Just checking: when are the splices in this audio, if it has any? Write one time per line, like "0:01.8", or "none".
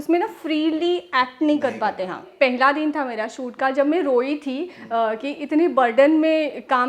0:02.3

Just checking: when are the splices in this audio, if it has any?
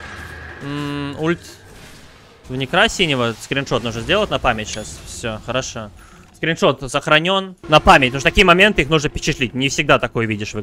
0:07.6

